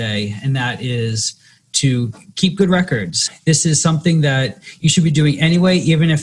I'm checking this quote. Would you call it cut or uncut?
cut